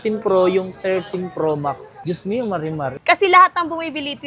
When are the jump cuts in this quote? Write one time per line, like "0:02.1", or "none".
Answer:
0:02.9